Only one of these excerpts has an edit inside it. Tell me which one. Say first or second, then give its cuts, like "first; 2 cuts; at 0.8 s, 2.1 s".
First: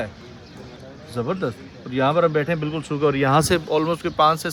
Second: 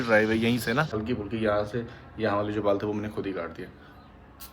second; 1 cut; at 0.9 s